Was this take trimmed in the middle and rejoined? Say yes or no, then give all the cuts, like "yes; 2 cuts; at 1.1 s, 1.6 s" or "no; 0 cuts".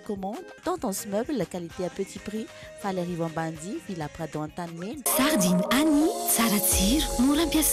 yes; 1 cut; at 5.0 s